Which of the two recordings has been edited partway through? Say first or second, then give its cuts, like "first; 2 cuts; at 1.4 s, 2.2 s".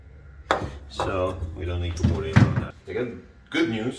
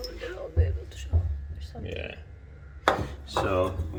first; 1 cut; at 2.7 s